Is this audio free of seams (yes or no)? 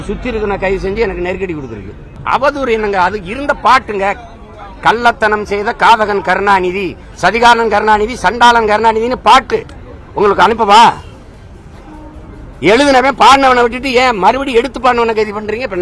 no